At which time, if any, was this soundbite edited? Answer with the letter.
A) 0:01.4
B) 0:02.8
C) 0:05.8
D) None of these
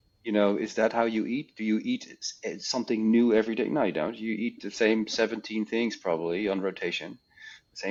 D